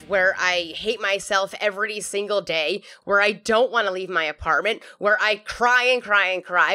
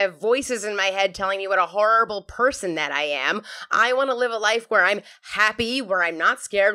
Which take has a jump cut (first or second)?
first